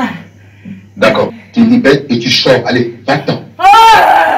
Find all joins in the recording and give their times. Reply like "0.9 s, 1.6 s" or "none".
1.4 s